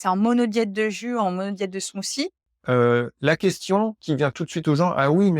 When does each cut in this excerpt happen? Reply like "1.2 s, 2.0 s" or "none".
2.5 s